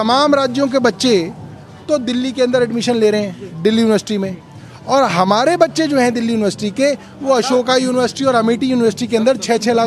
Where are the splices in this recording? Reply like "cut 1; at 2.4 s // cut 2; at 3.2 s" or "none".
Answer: none